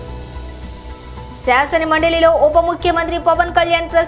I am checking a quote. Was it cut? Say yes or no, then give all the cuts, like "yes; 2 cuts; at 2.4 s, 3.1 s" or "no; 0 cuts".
yes; 1 cut; at 1.2 s